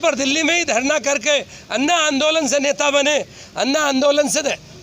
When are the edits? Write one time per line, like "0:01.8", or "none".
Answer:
none